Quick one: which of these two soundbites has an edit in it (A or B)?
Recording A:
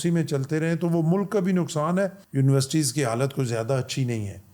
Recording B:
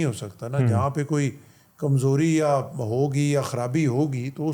A